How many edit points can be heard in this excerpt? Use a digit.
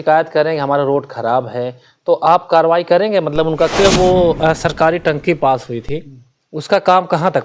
1